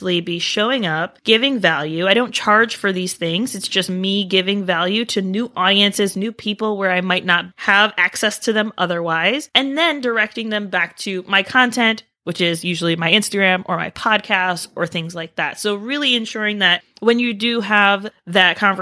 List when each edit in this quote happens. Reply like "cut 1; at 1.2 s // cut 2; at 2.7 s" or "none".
none